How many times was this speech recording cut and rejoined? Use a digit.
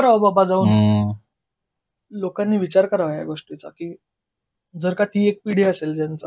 1